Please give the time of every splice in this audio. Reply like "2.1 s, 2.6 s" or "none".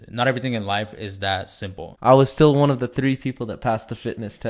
1.9 s